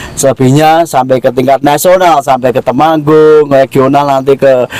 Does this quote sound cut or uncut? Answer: uncut